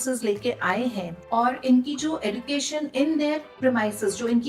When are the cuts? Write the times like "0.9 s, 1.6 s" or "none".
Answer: 1.2 s, 3.5 s

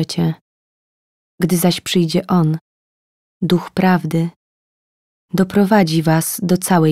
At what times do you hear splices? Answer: none

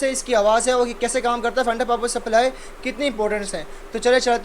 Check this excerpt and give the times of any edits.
none

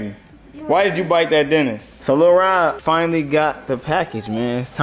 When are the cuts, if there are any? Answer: 1.9 s, 2.8 s

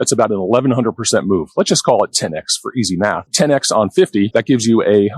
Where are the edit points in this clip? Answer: 3.2 s, 4.3 s

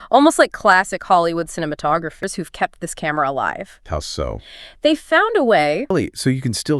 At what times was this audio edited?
2.3 s, 5.9 s

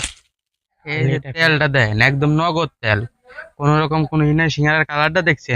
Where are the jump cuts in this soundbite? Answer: 1.1 s

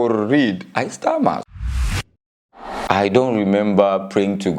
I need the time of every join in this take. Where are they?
1.4 s, 2.8 s

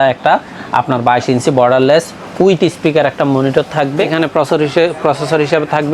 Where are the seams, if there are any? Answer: 4.0 s

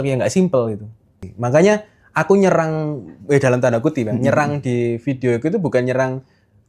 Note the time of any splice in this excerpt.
1.3 s

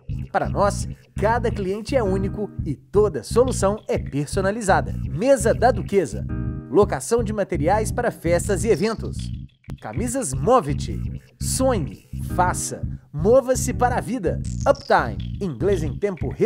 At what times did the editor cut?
none

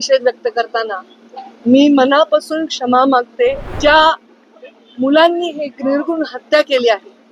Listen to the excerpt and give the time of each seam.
3.8 s

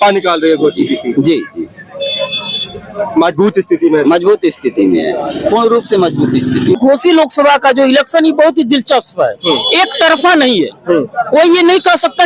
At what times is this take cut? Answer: 6.8 s

